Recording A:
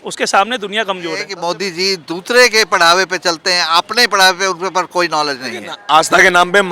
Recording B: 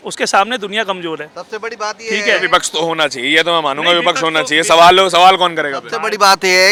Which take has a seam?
A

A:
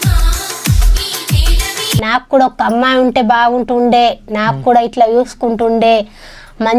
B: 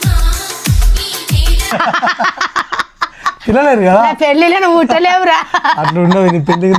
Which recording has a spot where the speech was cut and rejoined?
A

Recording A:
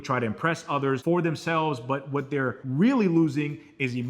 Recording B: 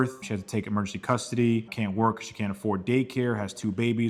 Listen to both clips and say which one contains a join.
A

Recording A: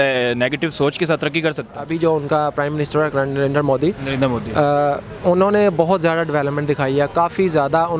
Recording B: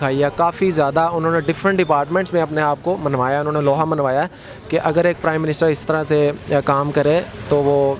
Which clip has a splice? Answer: A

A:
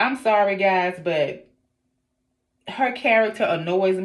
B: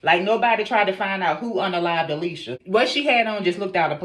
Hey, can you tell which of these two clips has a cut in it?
B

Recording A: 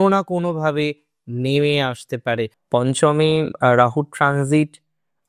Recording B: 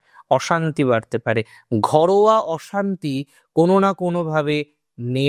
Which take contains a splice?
A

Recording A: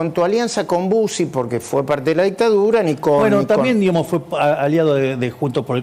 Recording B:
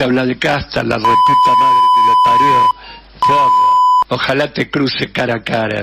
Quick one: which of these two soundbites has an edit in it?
B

